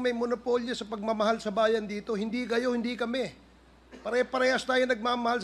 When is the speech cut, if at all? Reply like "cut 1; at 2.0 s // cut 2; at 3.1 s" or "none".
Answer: none